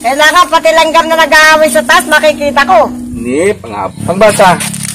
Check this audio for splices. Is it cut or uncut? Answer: cut